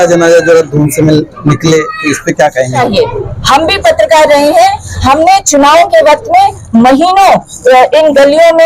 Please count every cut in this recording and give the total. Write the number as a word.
one